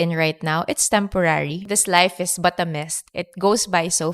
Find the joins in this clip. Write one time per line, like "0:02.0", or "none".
0:01.7